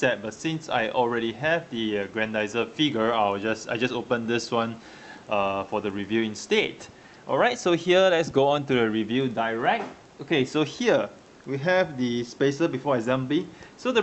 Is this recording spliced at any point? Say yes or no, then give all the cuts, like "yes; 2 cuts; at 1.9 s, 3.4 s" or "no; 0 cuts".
yes; 1 cut; at 3.6 s